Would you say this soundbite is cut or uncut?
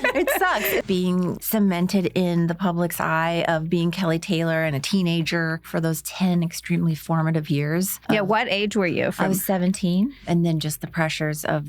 cut